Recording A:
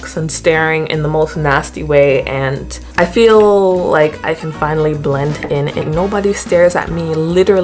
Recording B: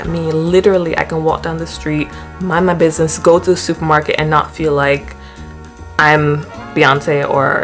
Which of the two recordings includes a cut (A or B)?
A